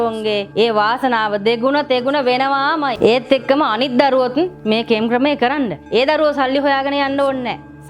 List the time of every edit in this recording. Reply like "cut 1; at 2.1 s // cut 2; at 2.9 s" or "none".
cut 1; at 5.8 s